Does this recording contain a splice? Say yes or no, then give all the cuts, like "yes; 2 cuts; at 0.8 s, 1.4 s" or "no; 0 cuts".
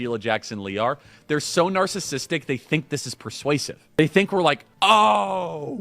yes; 2 cuts; at 4.0 s, 4.7 s